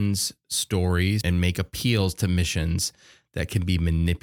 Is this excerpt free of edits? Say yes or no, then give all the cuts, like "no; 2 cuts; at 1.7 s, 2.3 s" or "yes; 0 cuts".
no; 1 cut; at 1.2 s